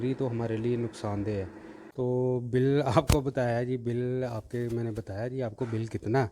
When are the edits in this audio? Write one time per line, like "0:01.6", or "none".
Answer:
0:01.8